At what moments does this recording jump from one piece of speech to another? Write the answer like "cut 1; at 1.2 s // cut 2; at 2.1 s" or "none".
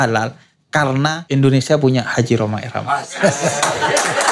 cut 1; at 1.2 s